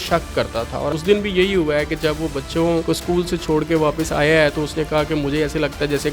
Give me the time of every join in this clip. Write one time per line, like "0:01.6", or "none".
0:00.9
0:02.8